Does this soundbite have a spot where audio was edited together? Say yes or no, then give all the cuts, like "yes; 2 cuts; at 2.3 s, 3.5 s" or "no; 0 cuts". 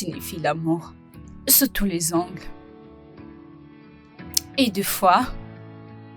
yes; 2 cuts; at 2.6 s, 4.0 s